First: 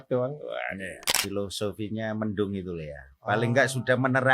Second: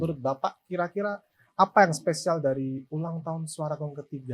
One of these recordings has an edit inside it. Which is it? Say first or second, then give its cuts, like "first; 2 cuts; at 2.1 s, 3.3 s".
first; 1 cut; at 1.1 s